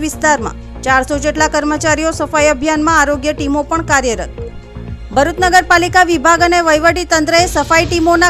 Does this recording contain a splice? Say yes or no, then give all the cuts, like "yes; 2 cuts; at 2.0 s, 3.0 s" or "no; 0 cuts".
no; 0 cuts